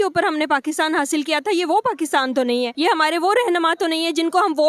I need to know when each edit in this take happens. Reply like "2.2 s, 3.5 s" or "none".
2.7 s